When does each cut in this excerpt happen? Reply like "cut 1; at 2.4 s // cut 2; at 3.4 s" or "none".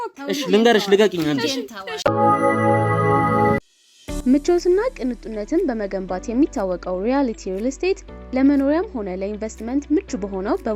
cut 1; at 1.9 s // cut 2; at 3.6 s